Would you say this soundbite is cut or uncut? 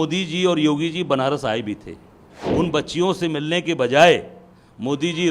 cut